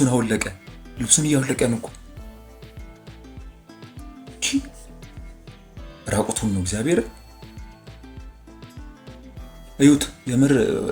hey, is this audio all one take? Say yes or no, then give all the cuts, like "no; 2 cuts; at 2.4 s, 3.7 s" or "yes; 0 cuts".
yes; 0 cuts